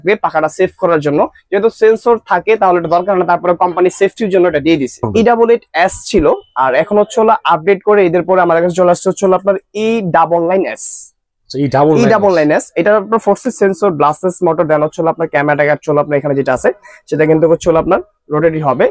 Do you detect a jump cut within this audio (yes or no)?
yes